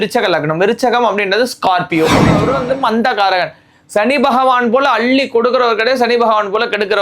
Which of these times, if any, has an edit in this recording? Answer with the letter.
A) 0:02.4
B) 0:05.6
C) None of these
A